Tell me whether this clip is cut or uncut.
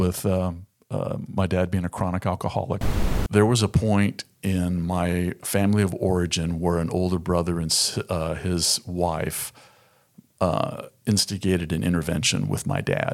cut